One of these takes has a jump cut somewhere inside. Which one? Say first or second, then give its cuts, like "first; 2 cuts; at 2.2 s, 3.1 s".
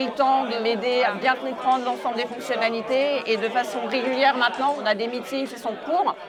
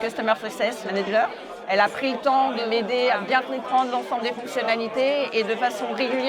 second; 1 cut; at 1.0 s